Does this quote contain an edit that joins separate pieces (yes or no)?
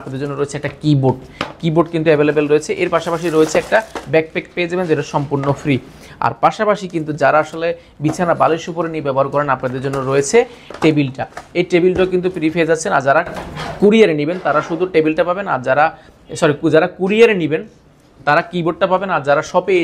no